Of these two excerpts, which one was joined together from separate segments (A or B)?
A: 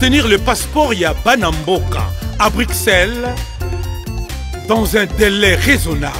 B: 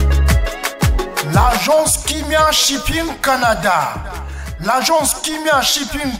B